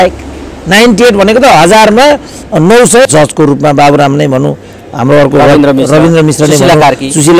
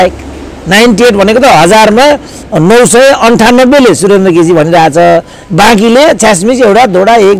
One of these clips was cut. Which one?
first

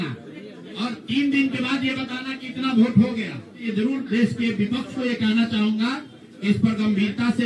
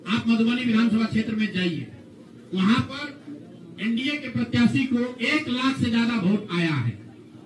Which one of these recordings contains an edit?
first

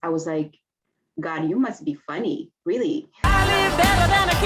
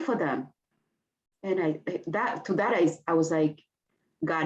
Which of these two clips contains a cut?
first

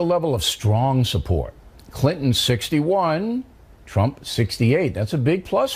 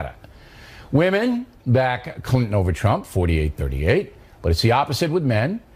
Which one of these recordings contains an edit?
first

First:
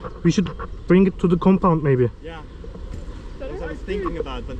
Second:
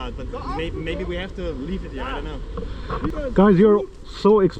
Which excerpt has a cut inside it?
second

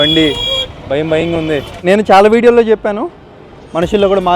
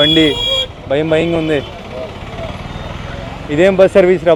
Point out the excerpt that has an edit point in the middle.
first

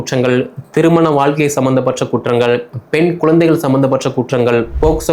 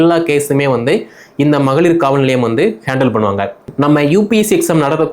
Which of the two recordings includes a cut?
second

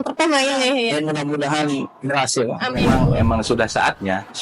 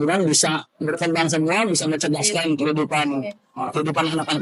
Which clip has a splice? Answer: first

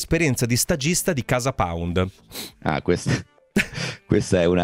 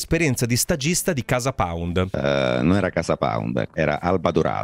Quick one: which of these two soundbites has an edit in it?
second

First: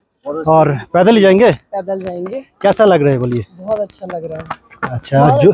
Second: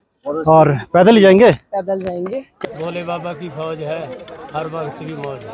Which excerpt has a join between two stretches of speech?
second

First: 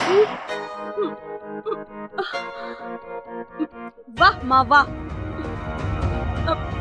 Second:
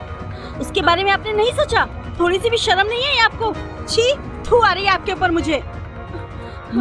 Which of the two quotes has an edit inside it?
second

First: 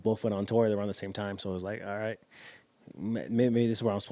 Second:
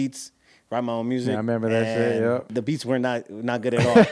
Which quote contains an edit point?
second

